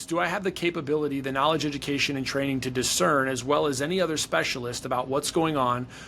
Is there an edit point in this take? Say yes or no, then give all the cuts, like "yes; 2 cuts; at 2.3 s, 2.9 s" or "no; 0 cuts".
no; 0 cuts